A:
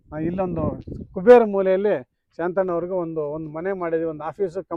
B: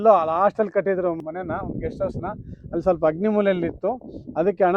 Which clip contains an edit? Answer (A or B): B